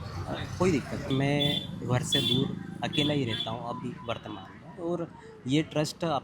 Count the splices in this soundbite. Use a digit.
1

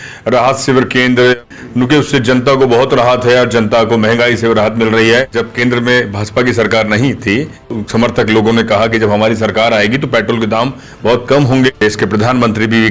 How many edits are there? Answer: 4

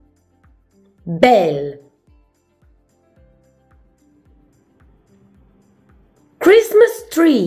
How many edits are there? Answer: 3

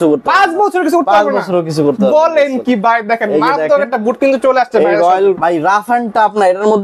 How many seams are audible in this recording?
1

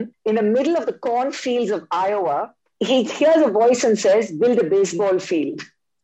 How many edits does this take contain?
1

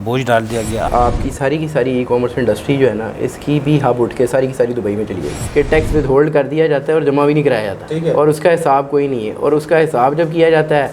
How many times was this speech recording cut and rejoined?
2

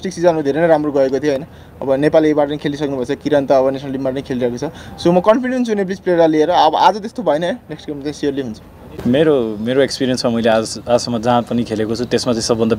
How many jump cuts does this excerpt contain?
1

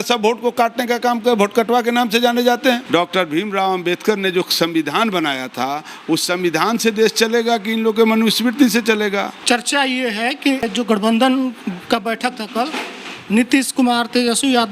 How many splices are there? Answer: 3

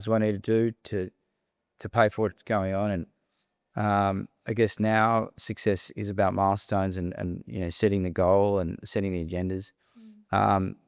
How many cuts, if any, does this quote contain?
0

